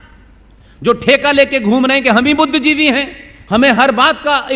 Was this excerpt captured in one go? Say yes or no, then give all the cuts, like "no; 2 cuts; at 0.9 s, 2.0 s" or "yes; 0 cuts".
yes; 0 cuts